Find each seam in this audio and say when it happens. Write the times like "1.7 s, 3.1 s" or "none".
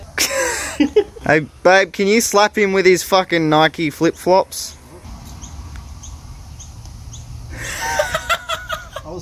1.1 s, 5.0 s